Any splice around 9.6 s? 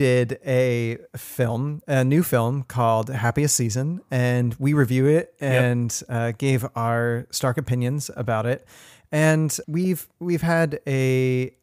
yes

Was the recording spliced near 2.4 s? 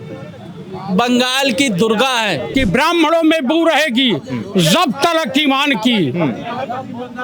yes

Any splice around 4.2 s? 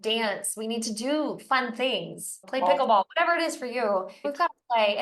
yes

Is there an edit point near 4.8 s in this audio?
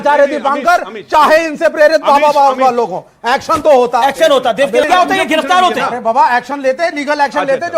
yes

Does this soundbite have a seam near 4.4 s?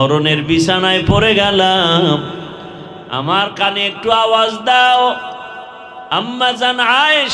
no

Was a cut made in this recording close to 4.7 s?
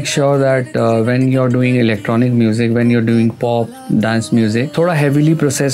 yes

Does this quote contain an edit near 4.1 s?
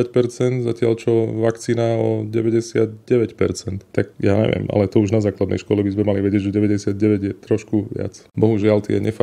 yes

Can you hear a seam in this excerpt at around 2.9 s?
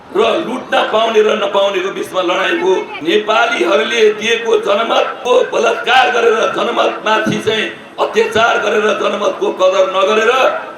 yes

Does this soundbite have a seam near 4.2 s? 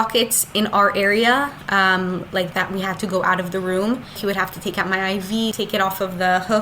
yes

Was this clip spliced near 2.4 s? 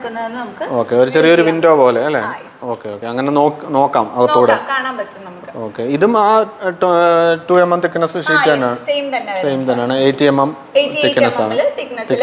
no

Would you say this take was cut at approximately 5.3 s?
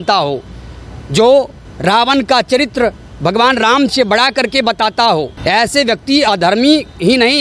yes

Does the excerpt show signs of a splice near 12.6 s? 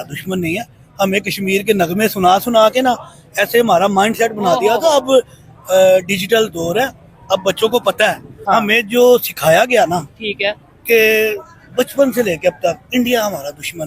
no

